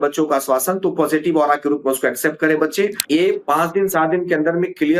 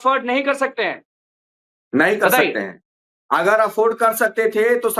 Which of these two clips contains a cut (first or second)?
first